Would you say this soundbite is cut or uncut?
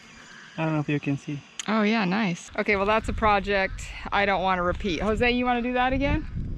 cut